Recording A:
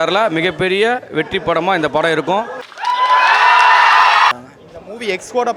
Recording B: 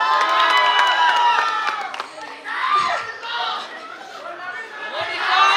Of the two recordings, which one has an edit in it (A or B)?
A